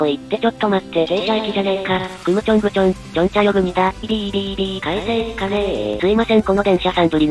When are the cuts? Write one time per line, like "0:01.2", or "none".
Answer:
0:04.1
0:05.9

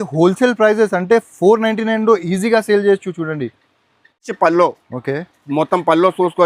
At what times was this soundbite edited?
0:04.3

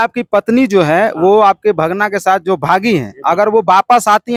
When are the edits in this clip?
none

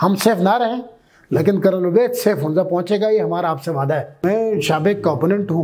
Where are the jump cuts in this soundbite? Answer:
0:04.2

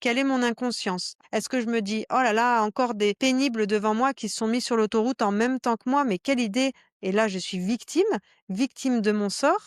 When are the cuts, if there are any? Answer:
0:01.1

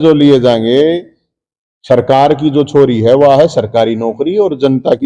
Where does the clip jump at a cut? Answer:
none

